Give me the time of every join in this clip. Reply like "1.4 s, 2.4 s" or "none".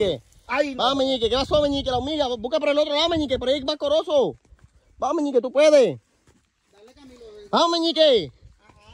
none